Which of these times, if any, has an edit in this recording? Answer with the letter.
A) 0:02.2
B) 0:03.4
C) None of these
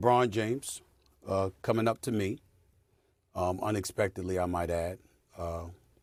C